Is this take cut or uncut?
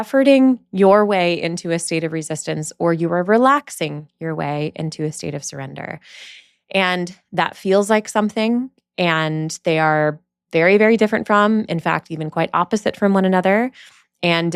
uncut